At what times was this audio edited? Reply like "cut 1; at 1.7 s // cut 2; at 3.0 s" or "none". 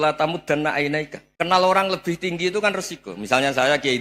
cut 1; at 1.2 s